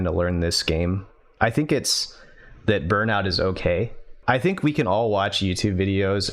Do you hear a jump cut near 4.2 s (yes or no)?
yes